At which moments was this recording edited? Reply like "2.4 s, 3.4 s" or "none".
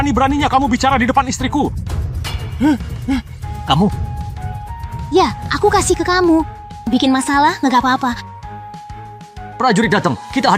none